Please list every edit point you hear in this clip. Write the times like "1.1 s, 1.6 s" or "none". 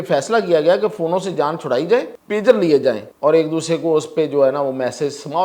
2.2 s, 3.1 s